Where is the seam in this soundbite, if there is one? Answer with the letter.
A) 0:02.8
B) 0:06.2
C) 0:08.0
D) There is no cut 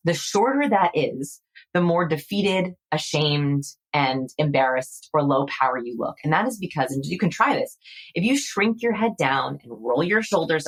D